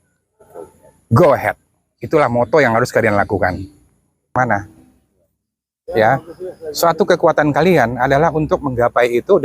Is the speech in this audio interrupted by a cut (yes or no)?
yes